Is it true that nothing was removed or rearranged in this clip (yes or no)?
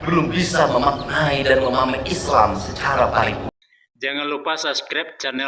no